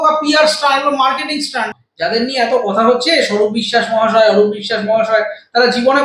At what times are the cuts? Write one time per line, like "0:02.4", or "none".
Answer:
0:01.6